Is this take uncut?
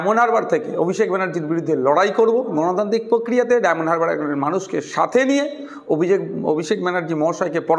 yes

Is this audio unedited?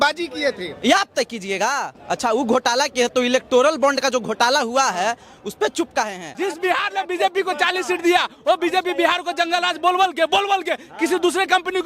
no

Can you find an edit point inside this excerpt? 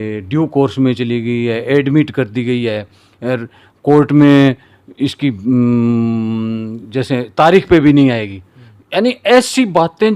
no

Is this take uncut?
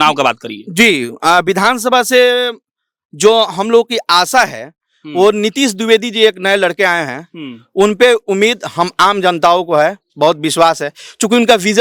yes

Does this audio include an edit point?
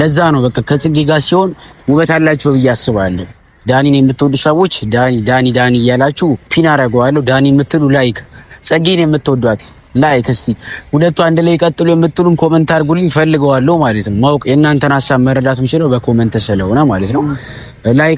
no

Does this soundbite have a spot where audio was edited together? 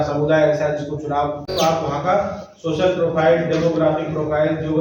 yes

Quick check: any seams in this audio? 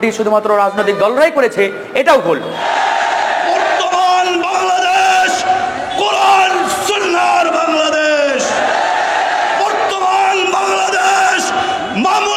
yes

